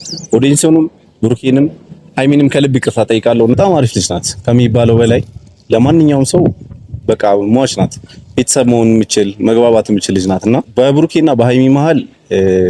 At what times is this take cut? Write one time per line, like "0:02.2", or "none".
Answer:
0:03.6
0:10.7